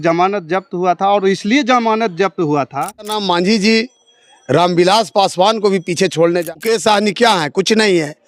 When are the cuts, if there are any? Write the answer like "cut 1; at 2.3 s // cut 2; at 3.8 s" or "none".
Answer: cut 1; at 3.2 s // cut 2; at 6.5 s